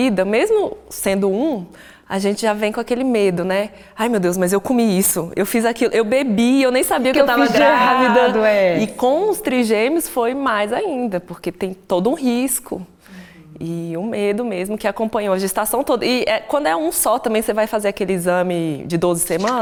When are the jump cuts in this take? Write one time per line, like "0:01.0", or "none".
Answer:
none